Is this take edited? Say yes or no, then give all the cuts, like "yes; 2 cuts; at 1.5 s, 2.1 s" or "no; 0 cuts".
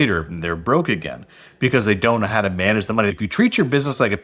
yes; 1 cut; at 3.1 s